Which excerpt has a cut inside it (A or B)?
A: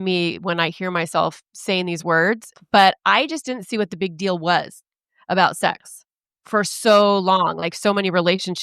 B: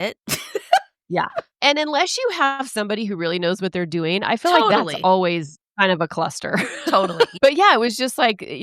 B